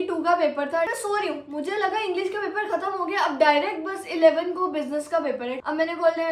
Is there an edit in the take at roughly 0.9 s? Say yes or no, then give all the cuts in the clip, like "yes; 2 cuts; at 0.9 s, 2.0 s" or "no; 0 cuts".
yes; 2 cuts; at 0.9 s, 5.6 s